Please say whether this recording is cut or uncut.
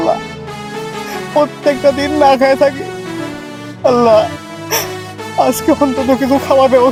uncut